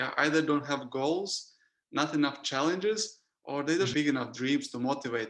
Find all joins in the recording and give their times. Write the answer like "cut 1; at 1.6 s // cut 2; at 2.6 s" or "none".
cut 1; at 3.9 s

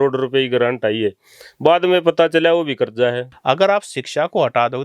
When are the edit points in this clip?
cut 1; at 3.3 s

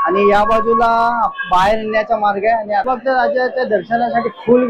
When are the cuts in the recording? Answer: cut 1; at 2.9 s

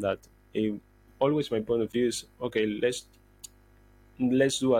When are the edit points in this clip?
cut 1; at 1.1 s

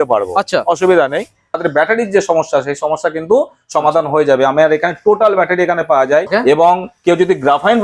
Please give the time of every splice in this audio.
cut 1; at 1.6 s // cut 2; at 6.3 s

